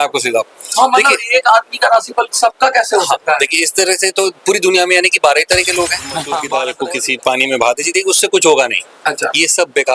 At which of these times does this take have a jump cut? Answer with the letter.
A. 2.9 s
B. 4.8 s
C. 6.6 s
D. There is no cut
C